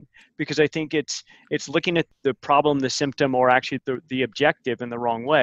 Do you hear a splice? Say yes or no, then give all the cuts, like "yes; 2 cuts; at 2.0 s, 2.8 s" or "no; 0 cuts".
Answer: yes; 2 cuts; at 2.1 s, 3.8 s